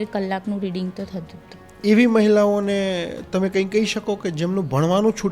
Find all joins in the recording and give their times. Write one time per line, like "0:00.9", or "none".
0:01.7